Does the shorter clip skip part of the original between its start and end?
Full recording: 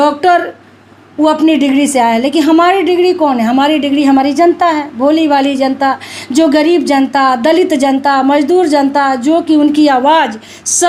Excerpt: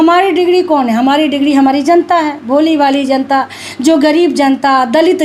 no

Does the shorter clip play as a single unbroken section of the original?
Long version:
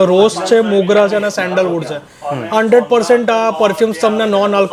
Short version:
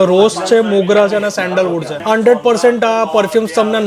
no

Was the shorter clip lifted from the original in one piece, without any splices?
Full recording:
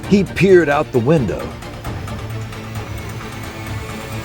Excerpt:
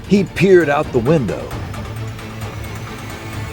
no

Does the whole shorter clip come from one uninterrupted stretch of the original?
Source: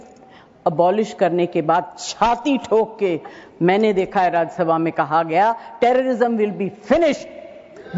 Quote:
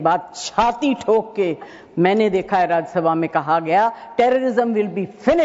yes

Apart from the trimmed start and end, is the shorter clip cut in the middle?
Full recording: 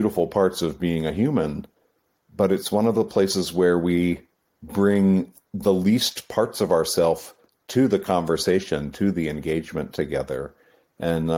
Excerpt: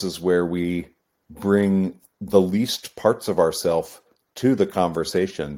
no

